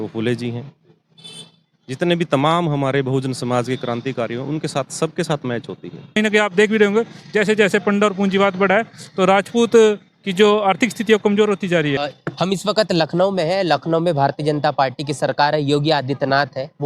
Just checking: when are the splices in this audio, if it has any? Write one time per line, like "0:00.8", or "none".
0:06.2
0:12.0